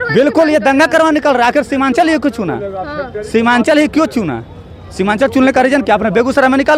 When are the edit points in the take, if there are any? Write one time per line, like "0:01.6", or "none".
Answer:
none